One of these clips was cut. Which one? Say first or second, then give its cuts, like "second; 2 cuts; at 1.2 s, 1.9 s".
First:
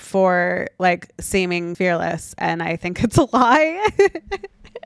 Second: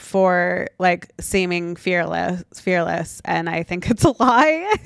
first; 1 cut; at 1.7 s